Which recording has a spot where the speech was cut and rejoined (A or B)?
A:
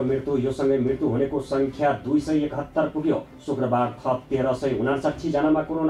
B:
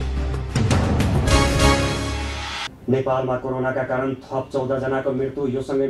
B